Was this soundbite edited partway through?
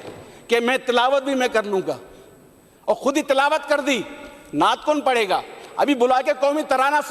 no; 0 cuts

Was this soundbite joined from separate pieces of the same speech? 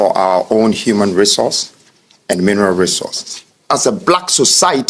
yes; 1 cut; at 3.6 s

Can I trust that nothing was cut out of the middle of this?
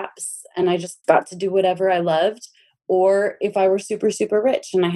no; 1 cut; at 0.9 s

